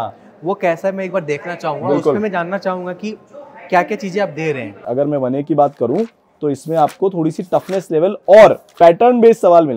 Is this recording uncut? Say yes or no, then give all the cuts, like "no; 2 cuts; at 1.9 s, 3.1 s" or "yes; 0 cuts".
no; 1 cut; at 4.7 s